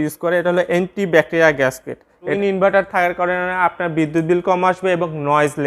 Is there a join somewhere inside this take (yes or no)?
yes